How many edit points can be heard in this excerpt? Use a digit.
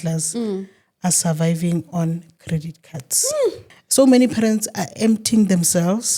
1